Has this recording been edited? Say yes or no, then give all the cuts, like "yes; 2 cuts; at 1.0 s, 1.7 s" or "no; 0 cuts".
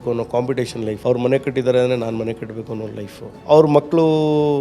yes; 2 cuts; at 1.0 s, 3.3 s